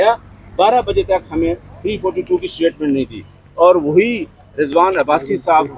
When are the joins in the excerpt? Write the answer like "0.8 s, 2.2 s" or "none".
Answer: none